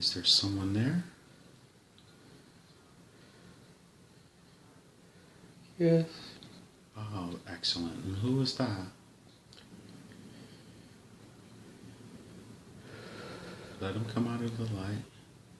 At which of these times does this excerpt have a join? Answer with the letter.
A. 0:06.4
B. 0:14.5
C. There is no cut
B